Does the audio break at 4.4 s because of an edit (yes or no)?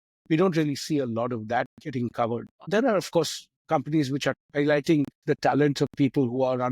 yes